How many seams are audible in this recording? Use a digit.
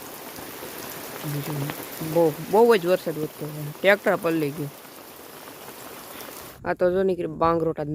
1